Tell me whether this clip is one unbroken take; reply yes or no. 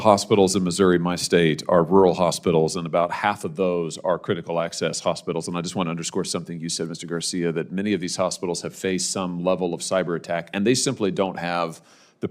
yes